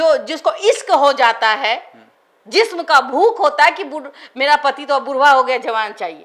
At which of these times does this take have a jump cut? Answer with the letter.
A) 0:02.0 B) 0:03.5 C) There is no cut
C